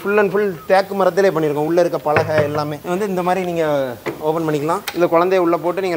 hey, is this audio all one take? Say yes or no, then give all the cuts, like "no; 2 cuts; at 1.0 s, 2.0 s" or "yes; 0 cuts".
no; 2 cuts; at 2.8 s, 4.8 s